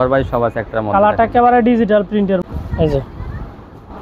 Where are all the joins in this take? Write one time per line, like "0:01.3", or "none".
0:02.4